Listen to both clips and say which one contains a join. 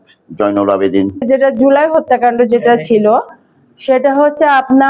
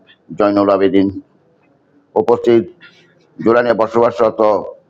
first; 1 cut; at 1.2 s

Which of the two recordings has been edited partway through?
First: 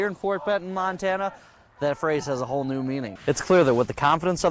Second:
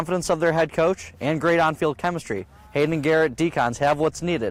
first; 1 cut; at 3.1 s

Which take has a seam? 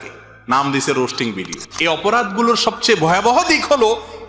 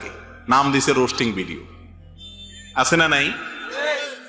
first; 1 cut; at 1.6 s

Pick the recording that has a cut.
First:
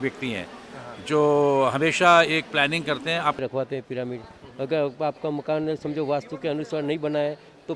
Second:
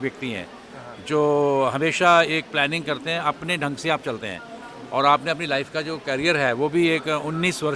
first; 1 cut; at 3.4 s

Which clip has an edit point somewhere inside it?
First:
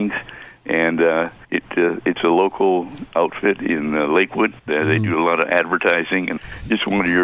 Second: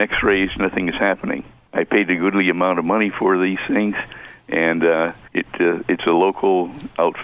first; 2 cuts; at 4.6 s, 6.3 s

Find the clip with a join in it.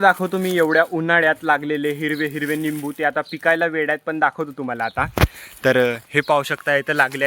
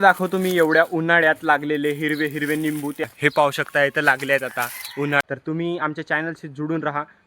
second; 2 cuts; at 3.0 s, 5.2 s

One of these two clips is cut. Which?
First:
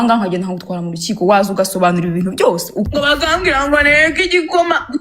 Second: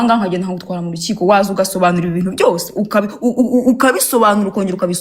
first; 1 cut; at 2.9 s

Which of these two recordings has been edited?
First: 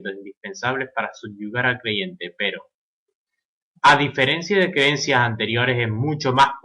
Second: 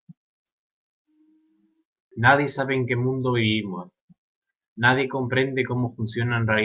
first; 1 cut; at 3.7 s

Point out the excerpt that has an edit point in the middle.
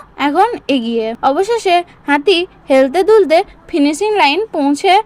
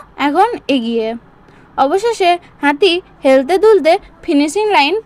first; 1 cut; at 1.1 s

